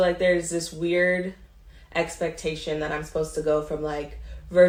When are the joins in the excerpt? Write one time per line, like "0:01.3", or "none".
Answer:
none